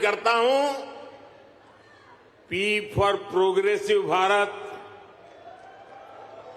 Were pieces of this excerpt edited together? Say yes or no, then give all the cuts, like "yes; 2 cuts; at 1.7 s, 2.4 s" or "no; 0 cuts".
yes; 1 cut; at 3.2 s